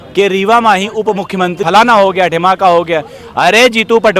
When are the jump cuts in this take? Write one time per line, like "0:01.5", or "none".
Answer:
0:01.6

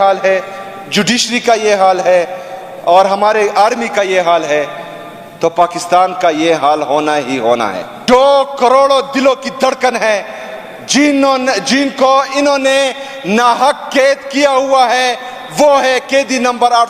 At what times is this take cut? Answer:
0:07.9

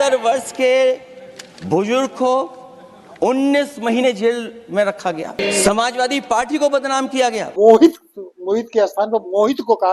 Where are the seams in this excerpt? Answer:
0:05.4
0:07.4

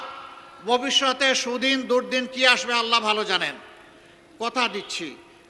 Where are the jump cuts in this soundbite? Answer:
none

